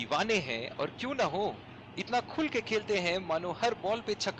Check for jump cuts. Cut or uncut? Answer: uncut